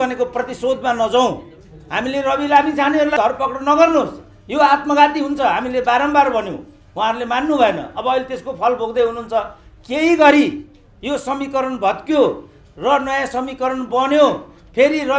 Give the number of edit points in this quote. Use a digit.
1